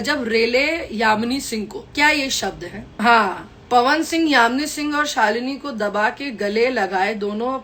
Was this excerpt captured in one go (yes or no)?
no